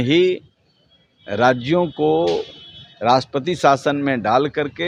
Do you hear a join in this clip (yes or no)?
no